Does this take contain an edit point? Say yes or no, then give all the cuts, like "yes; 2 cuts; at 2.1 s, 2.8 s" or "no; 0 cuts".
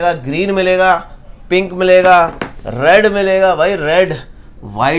no; 0 cuts